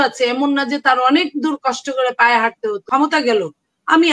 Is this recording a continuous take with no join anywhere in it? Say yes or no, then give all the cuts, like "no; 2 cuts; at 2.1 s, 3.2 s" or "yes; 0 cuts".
no; 1 cut; at 2.8 s